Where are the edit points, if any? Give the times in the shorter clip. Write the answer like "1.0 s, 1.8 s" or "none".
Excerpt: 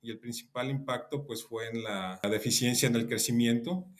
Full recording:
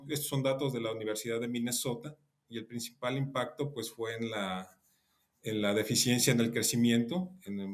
2.2 s

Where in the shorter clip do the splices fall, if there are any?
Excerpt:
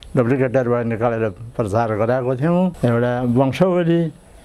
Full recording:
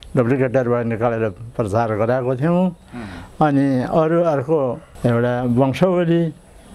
2.8 s

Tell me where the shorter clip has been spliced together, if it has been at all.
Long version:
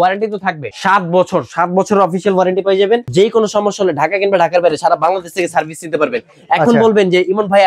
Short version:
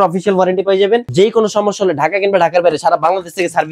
none

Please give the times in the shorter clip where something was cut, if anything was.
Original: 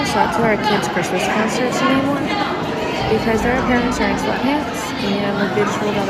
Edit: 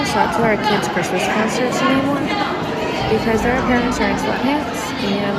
none

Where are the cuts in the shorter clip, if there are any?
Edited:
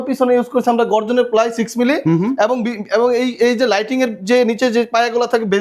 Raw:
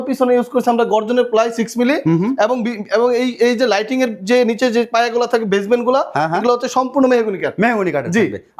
none

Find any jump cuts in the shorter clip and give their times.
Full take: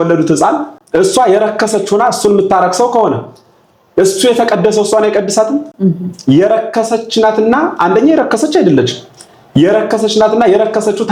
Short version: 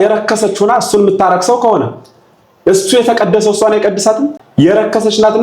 4.4 s

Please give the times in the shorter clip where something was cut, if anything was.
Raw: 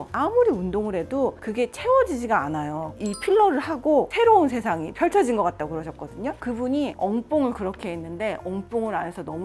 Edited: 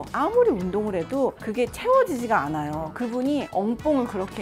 2.9 s

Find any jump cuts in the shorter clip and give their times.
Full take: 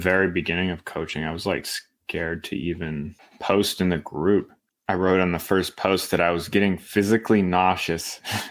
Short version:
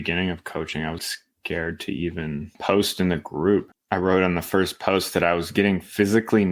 1.0 s, 2.5 s, 3.8 s

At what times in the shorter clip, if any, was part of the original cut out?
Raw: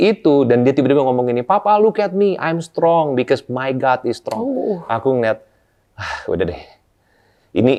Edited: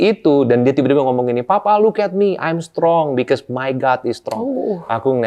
none

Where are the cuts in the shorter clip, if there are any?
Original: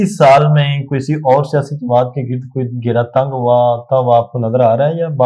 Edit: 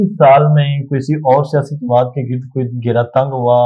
none

